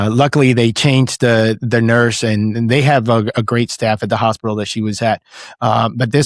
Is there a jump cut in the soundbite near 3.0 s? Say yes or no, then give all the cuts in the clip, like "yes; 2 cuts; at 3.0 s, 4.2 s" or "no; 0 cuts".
no; 0 cuts